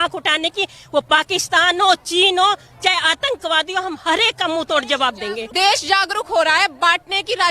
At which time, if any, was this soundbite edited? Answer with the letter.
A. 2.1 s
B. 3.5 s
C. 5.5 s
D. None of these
C